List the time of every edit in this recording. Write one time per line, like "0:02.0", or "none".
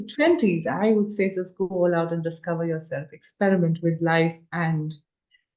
none